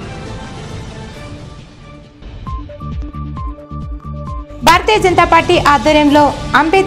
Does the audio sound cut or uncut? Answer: cut